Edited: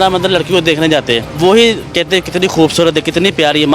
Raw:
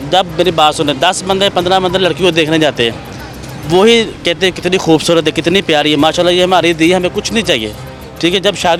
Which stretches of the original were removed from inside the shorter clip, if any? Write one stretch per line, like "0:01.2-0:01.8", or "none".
0:03.0-0:03.6

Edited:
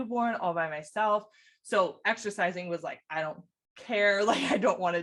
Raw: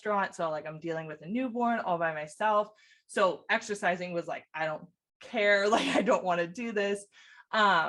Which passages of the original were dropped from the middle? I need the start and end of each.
none

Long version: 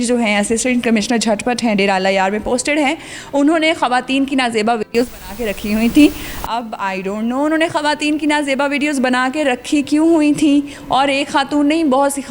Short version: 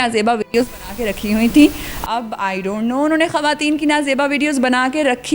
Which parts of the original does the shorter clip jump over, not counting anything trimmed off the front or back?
none

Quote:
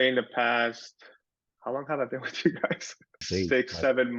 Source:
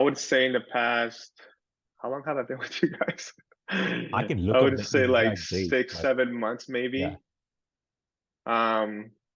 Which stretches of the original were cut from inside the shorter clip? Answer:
0:03.6-0:05.4

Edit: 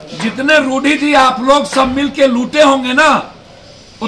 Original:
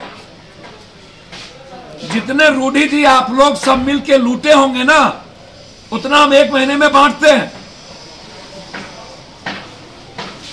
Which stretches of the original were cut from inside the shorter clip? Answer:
none

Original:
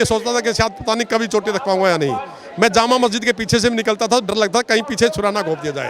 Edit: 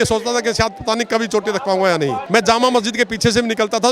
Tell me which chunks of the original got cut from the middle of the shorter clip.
0:02.2-0:02.5

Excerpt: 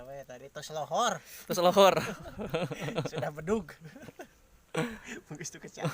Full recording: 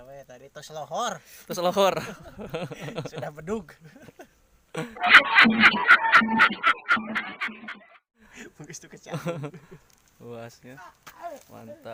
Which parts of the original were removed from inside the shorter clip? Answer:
0:04.9-0:08.2

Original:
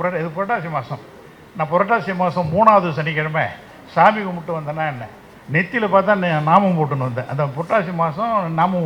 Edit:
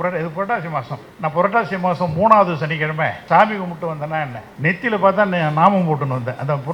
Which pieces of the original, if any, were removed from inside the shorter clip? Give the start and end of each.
0:01.0-0:01.4
0:03.5-0:03.8
0:05.1-0:05.3

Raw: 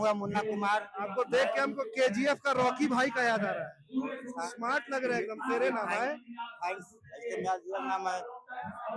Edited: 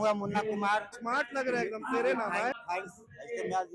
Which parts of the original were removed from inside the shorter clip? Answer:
0:00.9-0:04.5
0:06.1-0:06.5

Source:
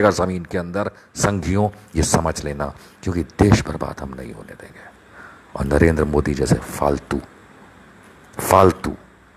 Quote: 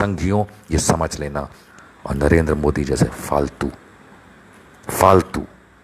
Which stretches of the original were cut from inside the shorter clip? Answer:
0:02.9-0:05.1

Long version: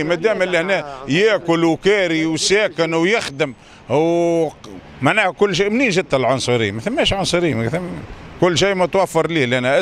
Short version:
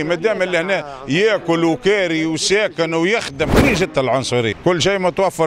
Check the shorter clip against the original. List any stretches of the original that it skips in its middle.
0:03.5-0:05.7
0:06.7-0:08.3

